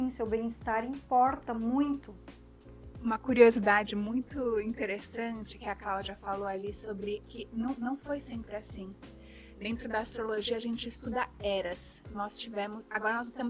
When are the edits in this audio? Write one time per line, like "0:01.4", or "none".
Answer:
none